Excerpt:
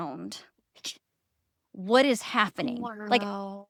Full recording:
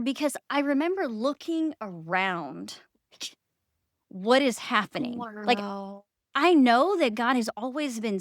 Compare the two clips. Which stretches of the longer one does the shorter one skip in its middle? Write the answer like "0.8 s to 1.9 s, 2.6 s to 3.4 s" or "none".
none